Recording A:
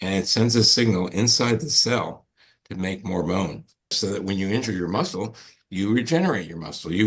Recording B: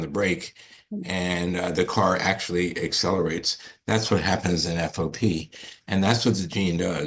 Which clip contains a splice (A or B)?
A